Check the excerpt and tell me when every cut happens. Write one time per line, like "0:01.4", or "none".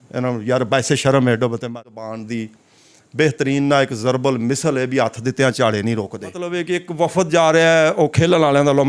0:01.8
0:06.6